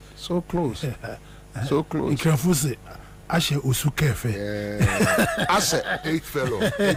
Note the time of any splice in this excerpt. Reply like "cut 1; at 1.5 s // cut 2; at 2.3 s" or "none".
none